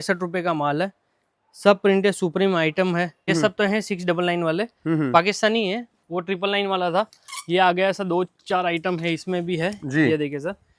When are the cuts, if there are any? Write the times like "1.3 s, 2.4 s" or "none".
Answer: 3.3 s

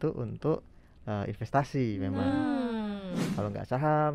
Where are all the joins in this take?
3.2 s

